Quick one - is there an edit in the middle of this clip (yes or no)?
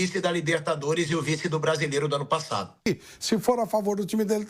yes